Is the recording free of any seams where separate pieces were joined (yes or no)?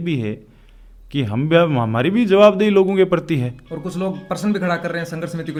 yes